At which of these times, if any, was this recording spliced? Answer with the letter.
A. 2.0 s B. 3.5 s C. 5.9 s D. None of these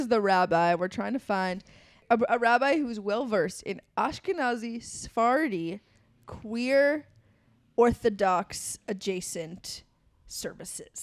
A